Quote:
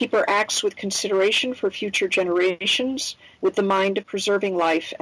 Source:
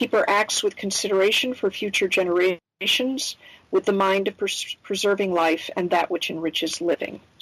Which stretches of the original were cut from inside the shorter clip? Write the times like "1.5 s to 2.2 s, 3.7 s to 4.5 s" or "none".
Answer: 2.9 s to 3.2 s, 4.3 s to 4.8 s